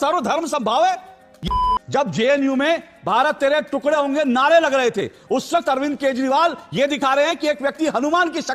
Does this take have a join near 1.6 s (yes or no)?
yes